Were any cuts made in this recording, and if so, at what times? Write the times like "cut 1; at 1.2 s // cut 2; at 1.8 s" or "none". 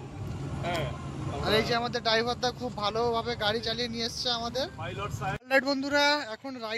cut 1; at 5.4 s